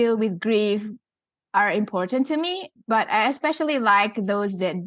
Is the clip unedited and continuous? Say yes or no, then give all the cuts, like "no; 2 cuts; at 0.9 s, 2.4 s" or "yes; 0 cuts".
yes; 0 cuts